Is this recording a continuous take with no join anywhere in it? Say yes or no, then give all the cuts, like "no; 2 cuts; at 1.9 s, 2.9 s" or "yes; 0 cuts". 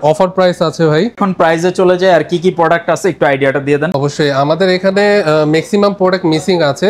yes; 0 cuts